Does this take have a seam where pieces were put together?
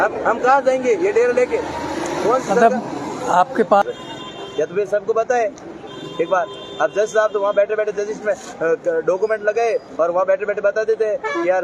yes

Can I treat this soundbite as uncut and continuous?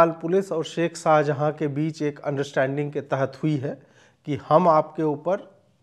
yes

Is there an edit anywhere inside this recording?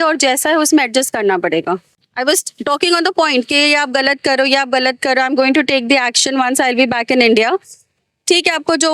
yes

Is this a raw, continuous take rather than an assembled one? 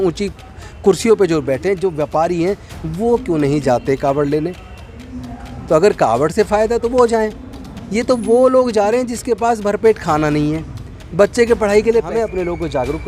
no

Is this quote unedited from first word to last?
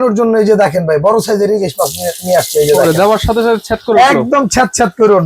yes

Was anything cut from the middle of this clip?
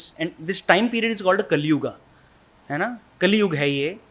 no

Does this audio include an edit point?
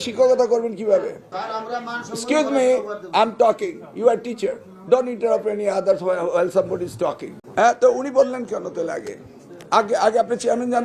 yes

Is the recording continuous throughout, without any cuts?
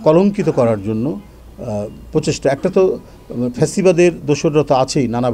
yes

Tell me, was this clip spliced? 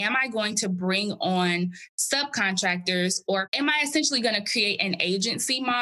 yes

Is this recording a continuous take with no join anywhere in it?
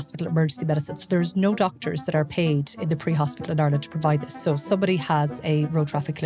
no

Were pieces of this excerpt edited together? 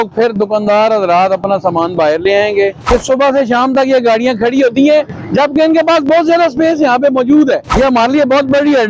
yes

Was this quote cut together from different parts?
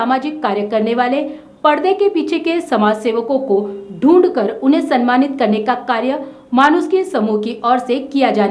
no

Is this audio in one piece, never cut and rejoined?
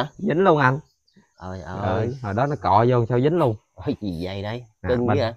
yes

